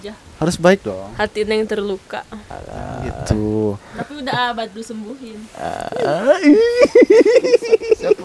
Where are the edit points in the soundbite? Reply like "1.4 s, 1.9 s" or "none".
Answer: none

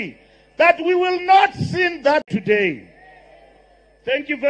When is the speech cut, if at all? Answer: 2.3 s

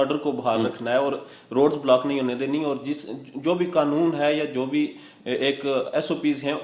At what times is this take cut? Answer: none

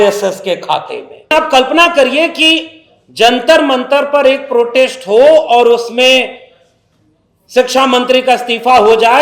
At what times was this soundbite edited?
1.3 s

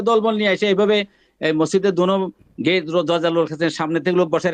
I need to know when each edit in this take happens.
none

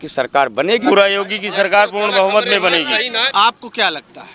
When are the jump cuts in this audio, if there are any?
0.8 s, 3.2 s

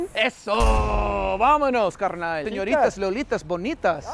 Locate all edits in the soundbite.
2.4 s

